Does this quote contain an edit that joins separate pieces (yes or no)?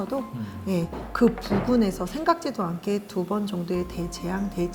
no